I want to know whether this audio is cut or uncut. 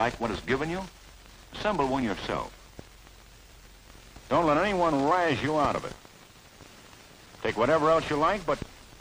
uncut